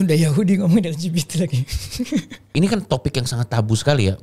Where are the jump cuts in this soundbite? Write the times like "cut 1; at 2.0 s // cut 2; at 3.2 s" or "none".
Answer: cut 1; at 2.5 s